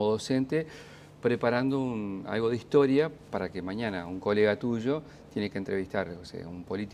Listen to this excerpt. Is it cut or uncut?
cut